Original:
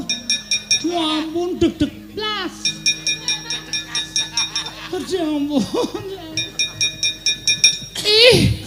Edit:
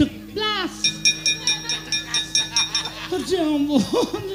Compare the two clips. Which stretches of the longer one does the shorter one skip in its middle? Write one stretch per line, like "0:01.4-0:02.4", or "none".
none